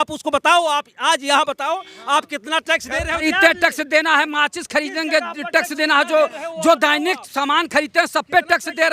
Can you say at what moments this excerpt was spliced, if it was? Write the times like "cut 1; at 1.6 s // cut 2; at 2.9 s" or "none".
cut 1; at 3.2 s

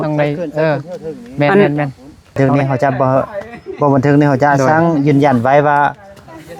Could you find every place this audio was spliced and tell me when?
cut 1; at 2.4 s

